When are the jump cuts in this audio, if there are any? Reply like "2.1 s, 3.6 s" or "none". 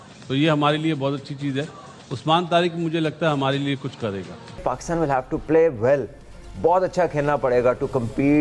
4.6 s

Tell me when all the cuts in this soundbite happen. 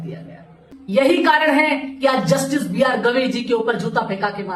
0.9 s

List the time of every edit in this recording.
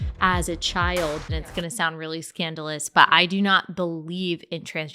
1.3 s

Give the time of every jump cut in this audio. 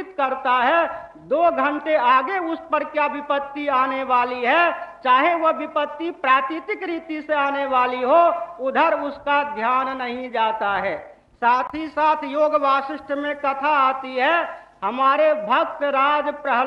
none

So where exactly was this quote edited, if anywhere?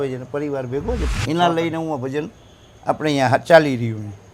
1.1 s

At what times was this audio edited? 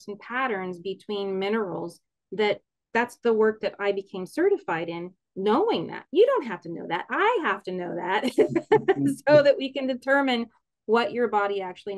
none

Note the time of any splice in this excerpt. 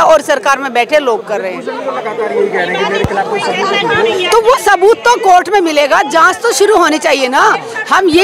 none

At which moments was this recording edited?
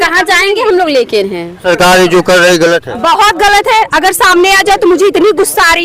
1.6 s

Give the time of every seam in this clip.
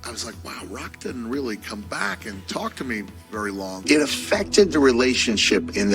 3.8 s

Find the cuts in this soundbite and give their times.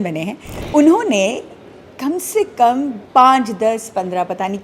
3.0 s

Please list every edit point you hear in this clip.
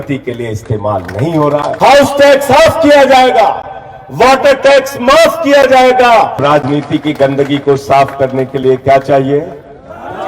1.8 s, 6.4 s

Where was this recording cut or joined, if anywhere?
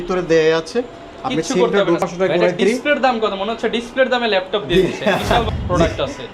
2.0 s, 5.5 s

